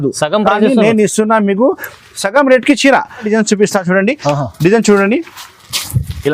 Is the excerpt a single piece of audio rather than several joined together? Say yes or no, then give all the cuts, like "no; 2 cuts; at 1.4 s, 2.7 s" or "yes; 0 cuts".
no; 1 cut; at 3.3 s